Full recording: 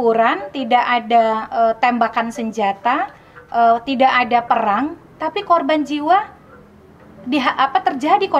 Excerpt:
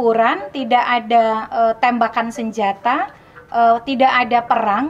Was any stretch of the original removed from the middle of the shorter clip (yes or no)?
no